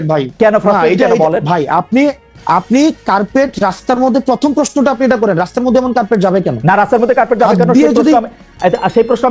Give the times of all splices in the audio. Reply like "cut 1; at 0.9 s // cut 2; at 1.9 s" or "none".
none